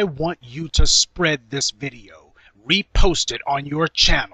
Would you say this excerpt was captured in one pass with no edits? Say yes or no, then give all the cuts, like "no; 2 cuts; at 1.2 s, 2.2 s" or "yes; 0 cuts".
no; 1 cut; at 1.4 s